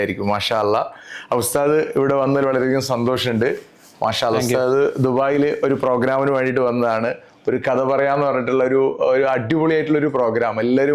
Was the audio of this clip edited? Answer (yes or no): no